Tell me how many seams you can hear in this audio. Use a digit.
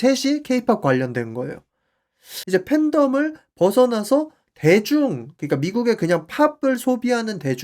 1